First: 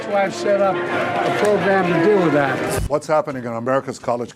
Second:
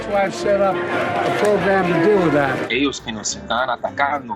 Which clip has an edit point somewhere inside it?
second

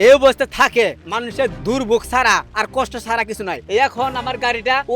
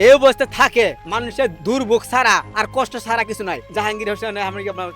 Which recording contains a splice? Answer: second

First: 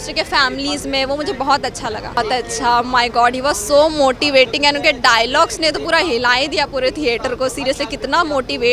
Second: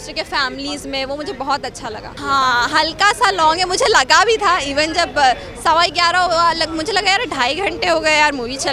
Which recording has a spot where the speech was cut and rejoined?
first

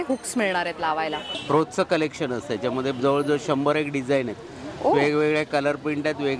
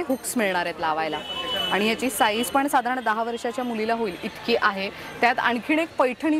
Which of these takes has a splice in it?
first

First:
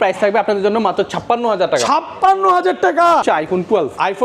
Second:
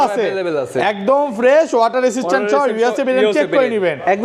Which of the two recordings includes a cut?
first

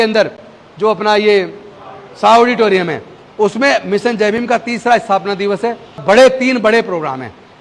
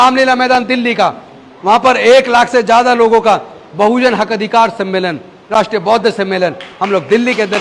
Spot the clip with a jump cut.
first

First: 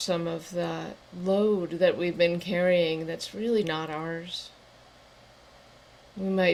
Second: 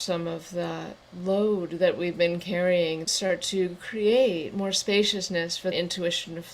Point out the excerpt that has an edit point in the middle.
second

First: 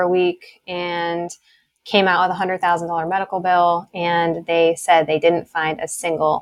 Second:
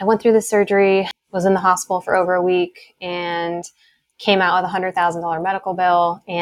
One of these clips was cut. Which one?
second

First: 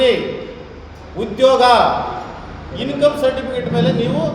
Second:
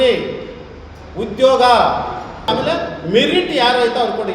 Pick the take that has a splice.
second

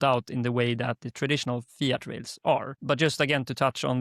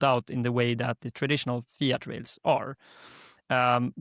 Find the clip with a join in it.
first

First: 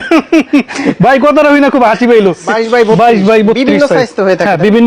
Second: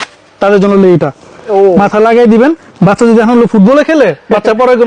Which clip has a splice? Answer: first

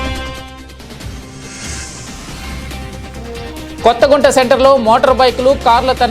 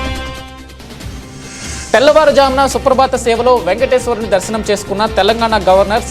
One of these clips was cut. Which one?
second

